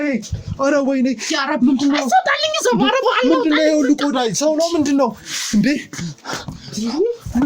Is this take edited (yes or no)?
no